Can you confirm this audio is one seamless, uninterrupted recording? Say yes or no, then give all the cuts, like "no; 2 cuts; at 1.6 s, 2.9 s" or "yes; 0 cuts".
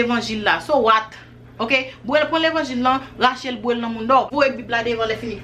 no; 1 cut; at 4.3 s